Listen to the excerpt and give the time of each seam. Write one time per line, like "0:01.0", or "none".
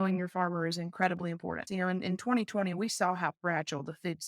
0:01.6